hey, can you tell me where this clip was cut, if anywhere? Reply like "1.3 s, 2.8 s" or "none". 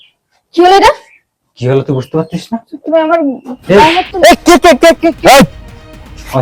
4.0 s